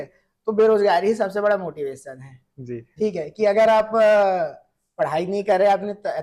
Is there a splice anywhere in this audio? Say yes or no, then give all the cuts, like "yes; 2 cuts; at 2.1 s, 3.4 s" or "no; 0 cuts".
no; 0 cuts